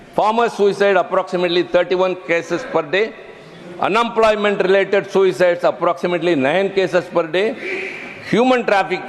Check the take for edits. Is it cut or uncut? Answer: uncut